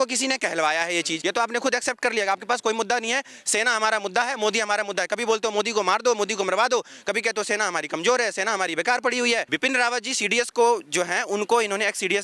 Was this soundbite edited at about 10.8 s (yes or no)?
no